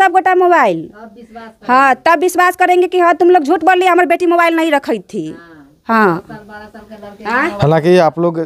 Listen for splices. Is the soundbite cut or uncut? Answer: uncut